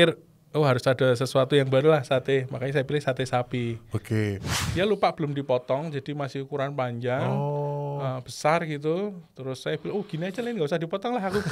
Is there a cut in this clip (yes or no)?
yes